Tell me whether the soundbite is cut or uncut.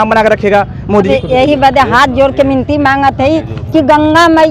cut